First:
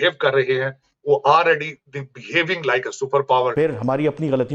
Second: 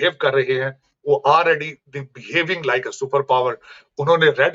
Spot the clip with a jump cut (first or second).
first